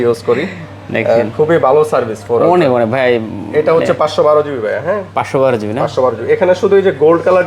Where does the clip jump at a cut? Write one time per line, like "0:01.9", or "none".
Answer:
none

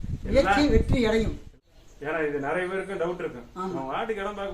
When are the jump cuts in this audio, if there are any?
0:01.4

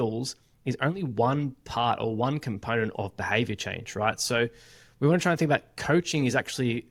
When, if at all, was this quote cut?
none

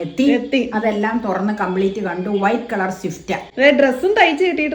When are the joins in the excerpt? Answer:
none

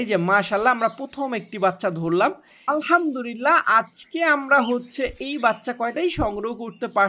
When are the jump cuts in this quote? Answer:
0:02.6

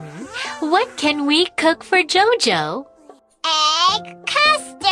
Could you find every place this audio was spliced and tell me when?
none

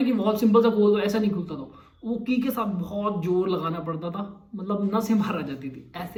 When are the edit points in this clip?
none

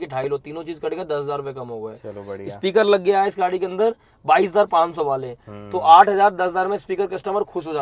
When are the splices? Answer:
none

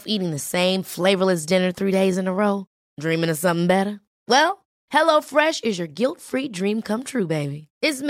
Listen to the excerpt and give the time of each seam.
none

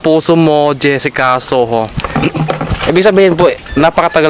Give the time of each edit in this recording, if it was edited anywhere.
0:02.0

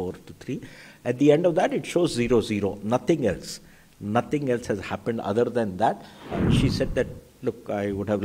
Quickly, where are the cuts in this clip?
0:06.4

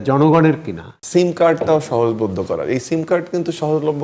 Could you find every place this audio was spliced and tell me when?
0:00.9

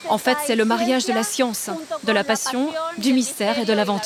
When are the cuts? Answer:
none

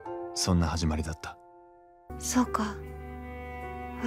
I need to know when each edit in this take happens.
0:02.1

